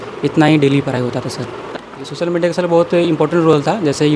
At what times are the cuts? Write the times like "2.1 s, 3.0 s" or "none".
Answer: 1.7 s